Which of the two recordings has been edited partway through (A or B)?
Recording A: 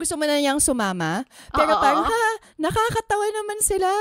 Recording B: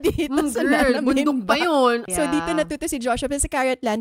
B